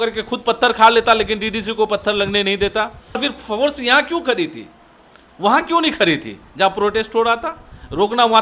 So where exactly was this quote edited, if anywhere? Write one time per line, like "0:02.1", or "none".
0:03.2